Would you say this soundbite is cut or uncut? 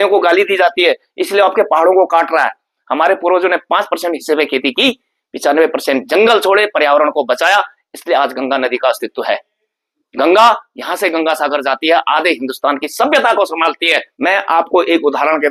cut